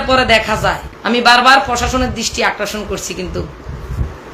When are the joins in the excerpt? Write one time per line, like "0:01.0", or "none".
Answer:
0:00.9